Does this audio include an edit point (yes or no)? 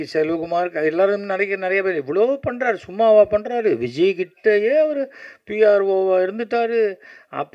no